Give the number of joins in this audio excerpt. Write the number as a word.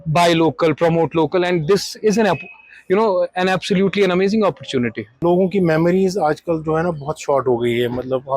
one